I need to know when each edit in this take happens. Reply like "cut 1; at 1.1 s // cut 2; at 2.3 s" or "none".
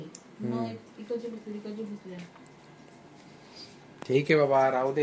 none